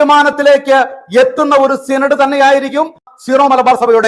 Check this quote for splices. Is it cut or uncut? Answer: cut